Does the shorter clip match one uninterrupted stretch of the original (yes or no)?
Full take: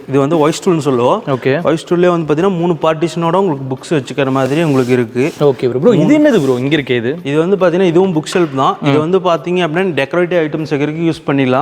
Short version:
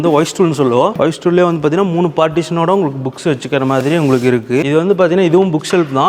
no